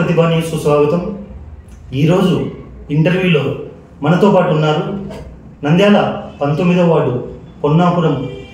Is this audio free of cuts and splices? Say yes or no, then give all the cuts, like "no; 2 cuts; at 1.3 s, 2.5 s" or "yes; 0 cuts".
yes; 0 cuts